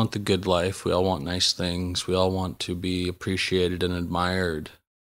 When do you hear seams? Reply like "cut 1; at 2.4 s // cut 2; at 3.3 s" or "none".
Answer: none